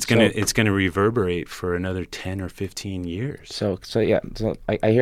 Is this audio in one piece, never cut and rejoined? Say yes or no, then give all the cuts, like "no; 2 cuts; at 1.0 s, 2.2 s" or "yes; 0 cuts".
yes; 0 cuts